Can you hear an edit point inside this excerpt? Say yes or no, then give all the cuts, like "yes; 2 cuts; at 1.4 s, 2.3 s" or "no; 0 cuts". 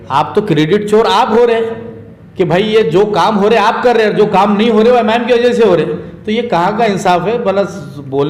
no; 0 cuts